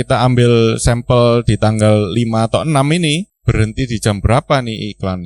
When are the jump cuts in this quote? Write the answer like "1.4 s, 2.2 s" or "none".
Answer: 3.3 s